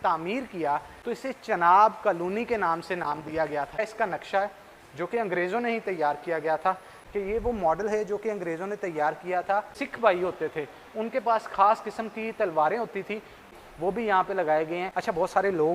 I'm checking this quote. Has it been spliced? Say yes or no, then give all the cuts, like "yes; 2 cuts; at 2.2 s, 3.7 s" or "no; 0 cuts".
yes; 6 cuts; at 0.9 s, 3.8 s, 6.9 s, 9.8 s, 13.4 s, 14.9 s